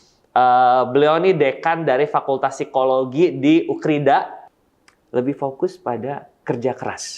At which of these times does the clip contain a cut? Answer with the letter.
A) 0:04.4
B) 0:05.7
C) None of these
A